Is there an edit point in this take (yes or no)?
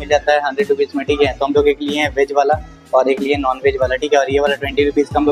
no